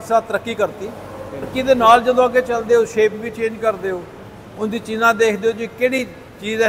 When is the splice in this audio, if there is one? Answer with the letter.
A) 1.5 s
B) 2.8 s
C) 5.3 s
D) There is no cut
A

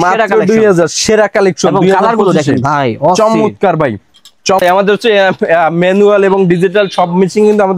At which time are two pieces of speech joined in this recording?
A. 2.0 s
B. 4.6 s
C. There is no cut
B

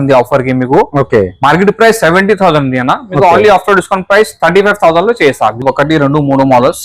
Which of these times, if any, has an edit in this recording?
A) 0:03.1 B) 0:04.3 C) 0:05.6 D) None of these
C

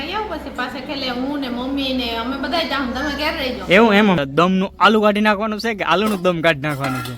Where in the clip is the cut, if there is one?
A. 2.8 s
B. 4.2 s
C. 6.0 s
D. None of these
B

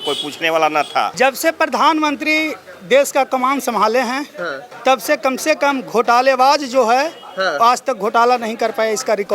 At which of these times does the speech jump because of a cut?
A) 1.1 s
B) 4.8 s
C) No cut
A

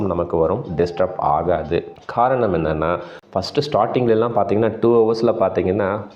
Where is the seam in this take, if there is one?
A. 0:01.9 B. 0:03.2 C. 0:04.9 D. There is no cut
B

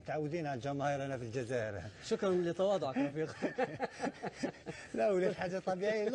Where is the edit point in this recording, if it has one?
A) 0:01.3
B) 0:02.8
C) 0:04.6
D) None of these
A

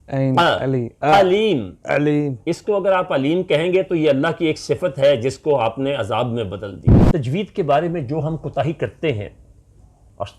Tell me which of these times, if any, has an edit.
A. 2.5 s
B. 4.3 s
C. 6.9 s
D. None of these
C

